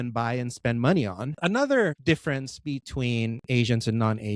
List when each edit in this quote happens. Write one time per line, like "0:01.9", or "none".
0:01.3
0:02.0